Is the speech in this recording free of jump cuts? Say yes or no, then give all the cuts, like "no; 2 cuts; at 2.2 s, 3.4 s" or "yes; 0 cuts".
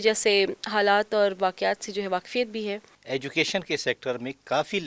no; 1 cut; at 2.9 s